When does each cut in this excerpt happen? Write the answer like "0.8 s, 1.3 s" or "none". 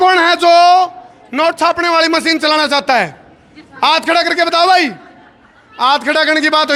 none

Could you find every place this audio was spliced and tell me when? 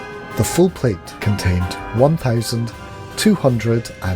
1.1 s

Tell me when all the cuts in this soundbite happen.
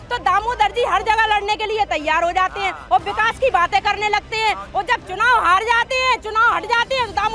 none

